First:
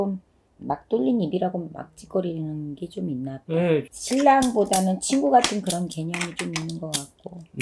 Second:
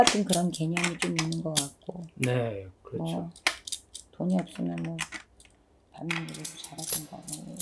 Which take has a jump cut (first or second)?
first